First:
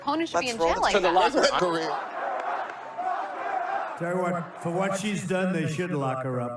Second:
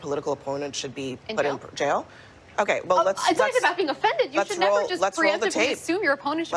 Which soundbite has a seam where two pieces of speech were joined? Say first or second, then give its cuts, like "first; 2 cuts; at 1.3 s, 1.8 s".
first; 1 cut; at 1.6 s